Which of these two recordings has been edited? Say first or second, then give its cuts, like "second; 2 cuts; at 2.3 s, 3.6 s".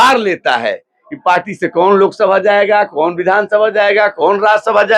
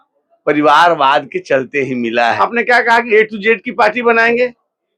second; 1 cut; at 2.4 s